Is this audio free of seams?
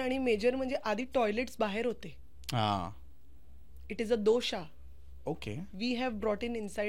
yes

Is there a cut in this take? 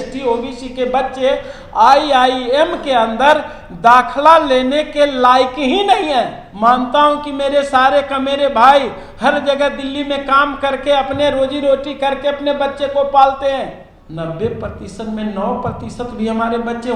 yes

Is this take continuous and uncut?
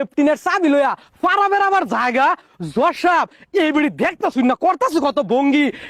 yes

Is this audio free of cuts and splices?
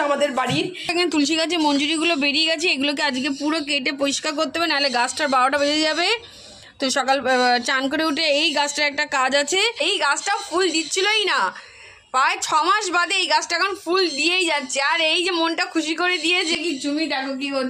no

